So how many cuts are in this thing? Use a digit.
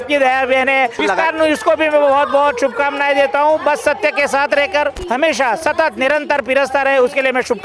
2